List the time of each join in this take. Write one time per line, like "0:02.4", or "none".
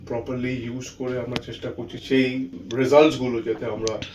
0:02.0
0:02.6